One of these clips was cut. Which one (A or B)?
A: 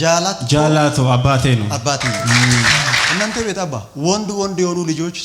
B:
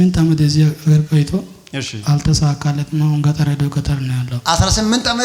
A